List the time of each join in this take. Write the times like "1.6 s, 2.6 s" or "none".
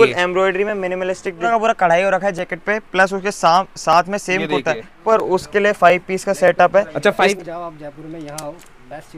1.5 s, 5.0 s, 7.3 s